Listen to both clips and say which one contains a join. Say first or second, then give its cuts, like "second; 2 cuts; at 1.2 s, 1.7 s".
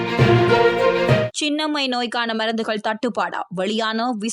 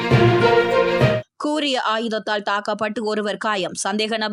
first; 1 cut; at 1.3 s